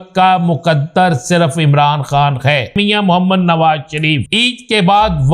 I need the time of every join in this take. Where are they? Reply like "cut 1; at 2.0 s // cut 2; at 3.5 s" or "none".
cut 1; at 2.8 s // cut 2; at 4.3 s